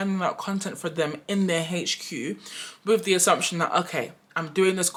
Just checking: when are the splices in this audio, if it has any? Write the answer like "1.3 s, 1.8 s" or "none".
none